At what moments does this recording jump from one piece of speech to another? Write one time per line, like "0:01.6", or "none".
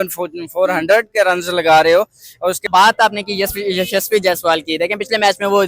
0:02.7